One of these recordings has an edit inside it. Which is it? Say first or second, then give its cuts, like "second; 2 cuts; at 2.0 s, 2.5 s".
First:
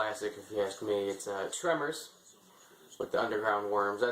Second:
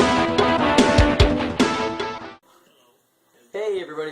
first; 1 cut; at 1.3 s